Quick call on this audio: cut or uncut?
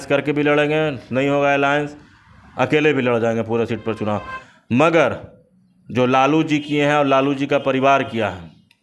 cut